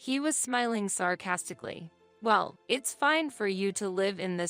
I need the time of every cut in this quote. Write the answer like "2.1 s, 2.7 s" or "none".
2.0 s